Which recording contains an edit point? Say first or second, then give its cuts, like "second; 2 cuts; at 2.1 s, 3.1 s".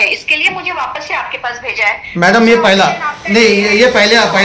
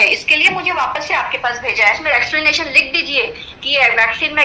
second; 1 cut; at 2.0 s